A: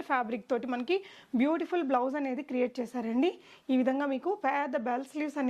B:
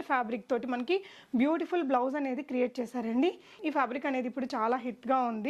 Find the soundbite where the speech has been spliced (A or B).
B